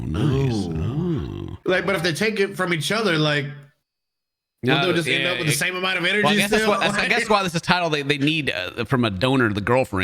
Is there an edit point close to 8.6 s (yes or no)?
no